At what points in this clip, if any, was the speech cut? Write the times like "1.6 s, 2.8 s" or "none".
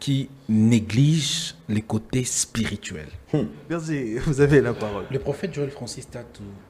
3.9 s